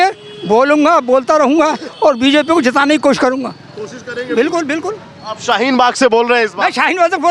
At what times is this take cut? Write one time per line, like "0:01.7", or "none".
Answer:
none